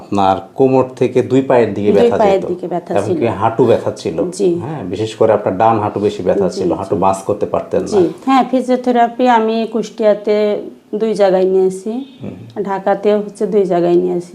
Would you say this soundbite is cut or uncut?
cut